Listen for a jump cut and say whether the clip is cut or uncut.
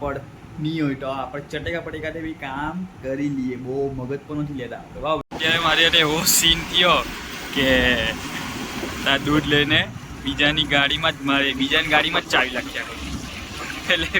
cut